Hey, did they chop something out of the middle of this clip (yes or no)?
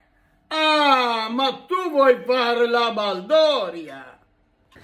no